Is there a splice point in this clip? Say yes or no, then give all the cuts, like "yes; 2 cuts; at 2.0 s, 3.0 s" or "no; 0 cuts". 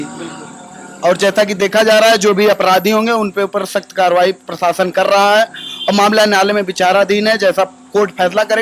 no; 0 cuts